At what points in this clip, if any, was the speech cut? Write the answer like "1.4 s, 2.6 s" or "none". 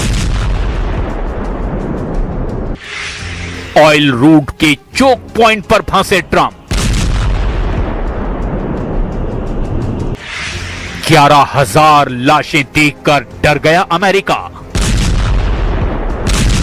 none

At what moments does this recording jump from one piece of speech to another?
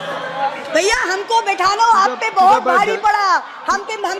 none

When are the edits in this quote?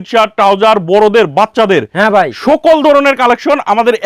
none

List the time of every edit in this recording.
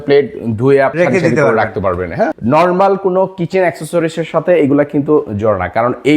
0.9 s, 2.4 s

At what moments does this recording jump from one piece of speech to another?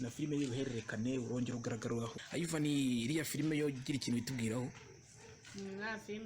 2.1 s

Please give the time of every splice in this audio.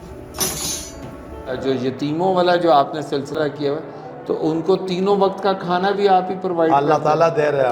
1.6 s

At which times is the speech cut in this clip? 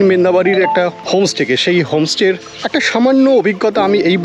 1.0 s, 2.5 s

